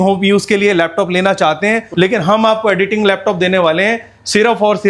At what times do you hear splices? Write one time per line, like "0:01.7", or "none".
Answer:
0:01.9